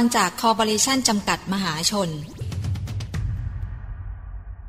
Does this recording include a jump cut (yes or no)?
yes